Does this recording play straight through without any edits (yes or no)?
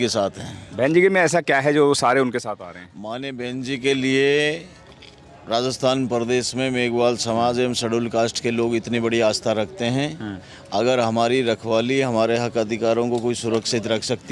yes